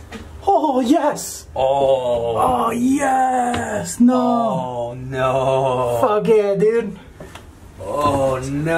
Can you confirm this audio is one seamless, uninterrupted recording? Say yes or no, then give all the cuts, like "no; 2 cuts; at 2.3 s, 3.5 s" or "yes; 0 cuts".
yes; 0 cuts